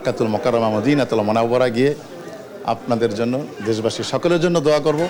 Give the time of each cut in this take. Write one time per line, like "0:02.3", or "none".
none